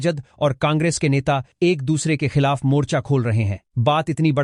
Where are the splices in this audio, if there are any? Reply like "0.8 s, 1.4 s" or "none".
none